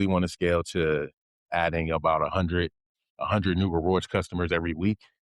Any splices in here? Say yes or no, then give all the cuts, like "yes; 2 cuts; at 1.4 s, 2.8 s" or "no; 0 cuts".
no; 0 cuts